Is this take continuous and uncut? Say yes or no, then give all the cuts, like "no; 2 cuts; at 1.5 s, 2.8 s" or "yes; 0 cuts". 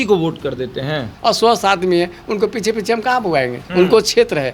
no; 2 cuts; at 1.1 s, 3.6 s